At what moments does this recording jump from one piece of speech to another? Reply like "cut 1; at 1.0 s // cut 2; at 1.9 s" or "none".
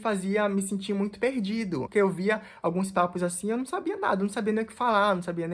cut 1; at 1.9 s